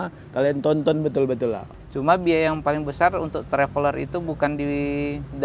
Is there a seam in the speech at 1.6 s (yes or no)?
yes